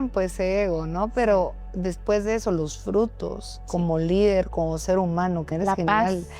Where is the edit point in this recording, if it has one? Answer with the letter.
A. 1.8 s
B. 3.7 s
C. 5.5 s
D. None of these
C